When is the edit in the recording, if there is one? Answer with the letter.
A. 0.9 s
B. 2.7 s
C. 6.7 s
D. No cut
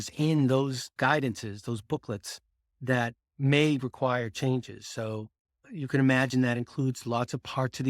A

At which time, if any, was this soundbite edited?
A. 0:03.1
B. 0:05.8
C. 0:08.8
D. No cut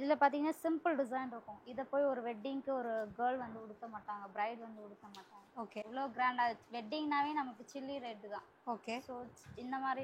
D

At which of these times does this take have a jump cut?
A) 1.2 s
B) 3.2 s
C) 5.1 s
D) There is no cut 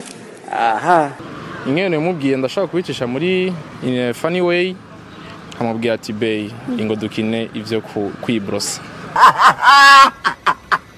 A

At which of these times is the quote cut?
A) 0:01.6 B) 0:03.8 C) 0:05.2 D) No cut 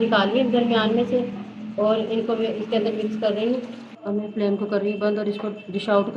B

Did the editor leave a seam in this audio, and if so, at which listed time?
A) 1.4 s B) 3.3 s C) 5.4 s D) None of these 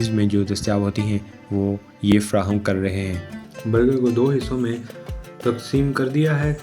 B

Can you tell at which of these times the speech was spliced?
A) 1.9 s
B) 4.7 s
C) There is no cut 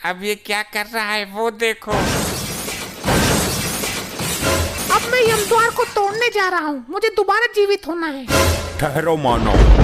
B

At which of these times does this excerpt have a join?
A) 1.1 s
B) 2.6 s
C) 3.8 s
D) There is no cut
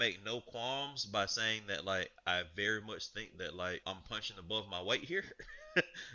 C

